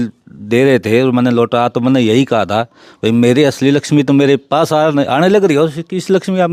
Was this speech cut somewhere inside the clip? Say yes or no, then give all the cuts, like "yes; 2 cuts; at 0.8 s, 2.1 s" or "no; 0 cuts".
no; 0 cuts